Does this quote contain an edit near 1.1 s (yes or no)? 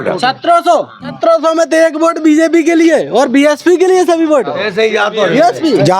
yes